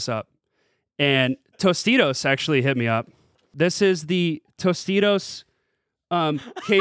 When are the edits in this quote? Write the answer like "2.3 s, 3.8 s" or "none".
3.5 s